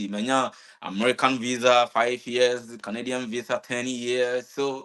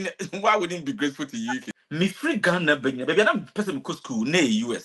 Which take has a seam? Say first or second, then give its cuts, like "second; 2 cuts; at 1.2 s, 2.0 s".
second; 1 cut; at 1.6 s